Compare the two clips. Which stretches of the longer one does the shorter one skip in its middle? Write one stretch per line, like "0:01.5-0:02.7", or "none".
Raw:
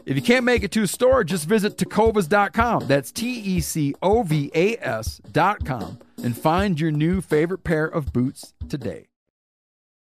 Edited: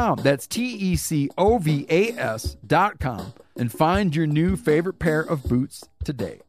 none